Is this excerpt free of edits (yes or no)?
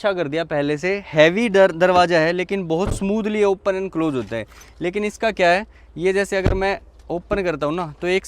yes